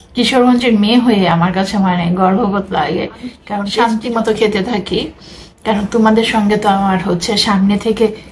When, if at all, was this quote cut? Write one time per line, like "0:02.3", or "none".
0:03.5